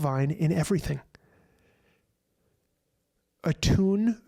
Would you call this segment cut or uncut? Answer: uncut